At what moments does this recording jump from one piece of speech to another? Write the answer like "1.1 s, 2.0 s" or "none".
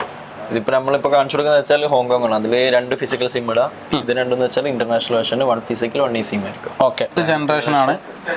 7.1 s